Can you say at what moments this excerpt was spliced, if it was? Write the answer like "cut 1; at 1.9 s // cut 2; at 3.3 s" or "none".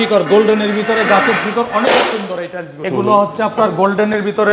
cut 1; at 2.8 s